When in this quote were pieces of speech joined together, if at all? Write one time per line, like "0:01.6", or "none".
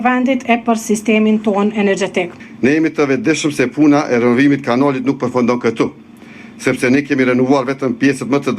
0:02.4